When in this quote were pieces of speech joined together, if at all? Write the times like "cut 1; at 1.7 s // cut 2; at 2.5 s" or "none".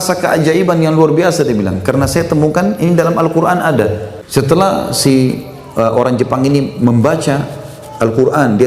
cut 1; at 4.1 s